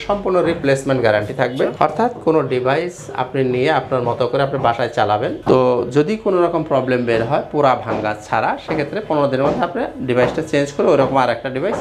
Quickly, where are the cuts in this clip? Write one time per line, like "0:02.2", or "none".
none